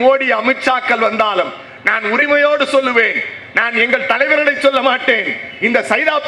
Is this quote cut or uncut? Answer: uncut